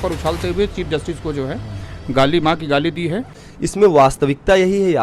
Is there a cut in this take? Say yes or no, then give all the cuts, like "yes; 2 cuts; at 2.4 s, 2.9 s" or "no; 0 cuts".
yes; 1 cut; at 3.4 s